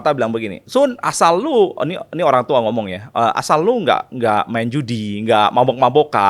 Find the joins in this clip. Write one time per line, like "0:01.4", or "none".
none